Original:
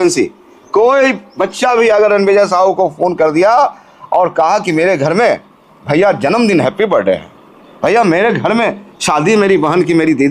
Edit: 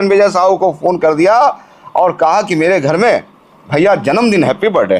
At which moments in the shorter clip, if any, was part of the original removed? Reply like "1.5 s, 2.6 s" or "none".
none

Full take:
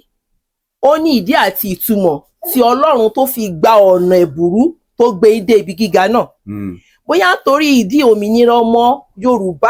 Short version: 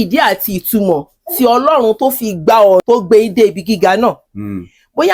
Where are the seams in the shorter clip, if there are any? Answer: 2.8 s

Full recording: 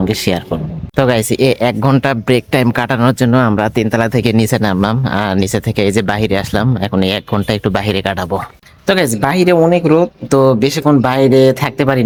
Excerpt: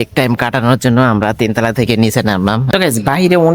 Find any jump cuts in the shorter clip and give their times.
2.7 s

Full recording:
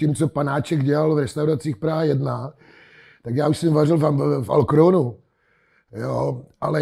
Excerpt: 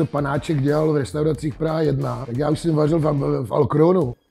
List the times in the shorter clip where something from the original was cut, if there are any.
2.2 s

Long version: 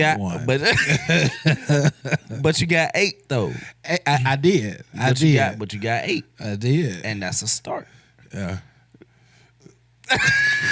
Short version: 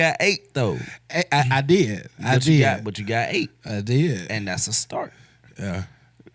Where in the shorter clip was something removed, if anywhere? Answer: none

